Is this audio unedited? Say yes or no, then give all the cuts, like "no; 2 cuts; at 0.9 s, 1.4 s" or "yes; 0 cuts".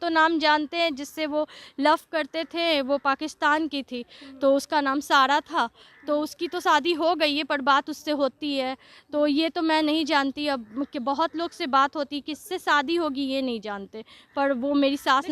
yes; 0 cuts